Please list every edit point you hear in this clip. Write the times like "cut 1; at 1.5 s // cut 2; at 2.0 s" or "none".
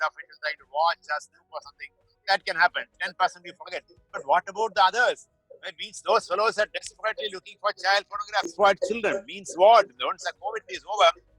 cut 1; at 8.5 s